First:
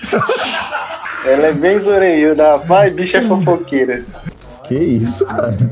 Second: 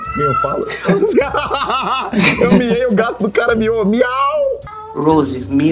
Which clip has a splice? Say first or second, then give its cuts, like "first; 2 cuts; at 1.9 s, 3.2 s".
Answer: first; 1 cut; at 4.2 s